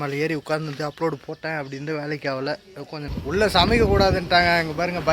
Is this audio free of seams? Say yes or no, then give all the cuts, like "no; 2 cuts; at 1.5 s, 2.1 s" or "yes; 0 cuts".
no; 1 cut; at 3.0 s